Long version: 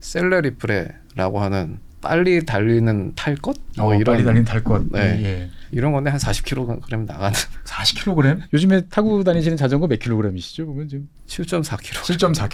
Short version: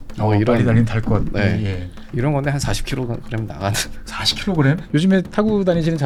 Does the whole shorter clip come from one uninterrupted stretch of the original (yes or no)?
yes